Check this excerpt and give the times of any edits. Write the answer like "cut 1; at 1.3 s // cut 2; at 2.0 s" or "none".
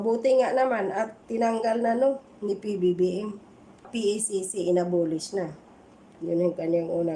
cut 1; at 3.9 s